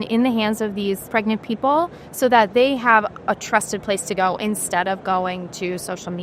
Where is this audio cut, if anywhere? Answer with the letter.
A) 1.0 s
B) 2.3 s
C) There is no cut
A